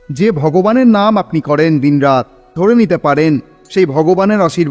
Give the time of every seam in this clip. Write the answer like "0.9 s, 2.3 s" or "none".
2.4 s